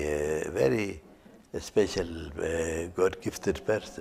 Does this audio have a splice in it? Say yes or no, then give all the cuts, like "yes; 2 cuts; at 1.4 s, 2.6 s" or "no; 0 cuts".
no; 0 cuts